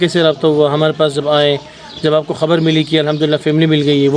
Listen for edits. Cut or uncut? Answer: uncut